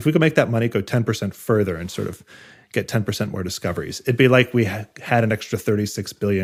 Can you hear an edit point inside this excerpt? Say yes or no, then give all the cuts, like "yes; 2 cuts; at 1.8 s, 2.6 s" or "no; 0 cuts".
no; 0 cuts